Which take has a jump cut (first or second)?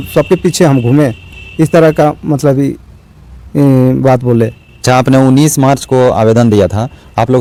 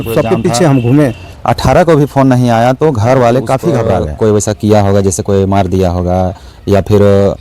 second